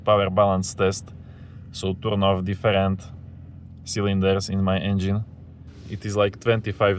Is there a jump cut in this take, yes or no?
no